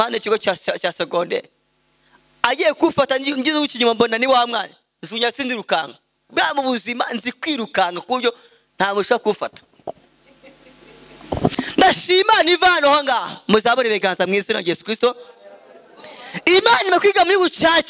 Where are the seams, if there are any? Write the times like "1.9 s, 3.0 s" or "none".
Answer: none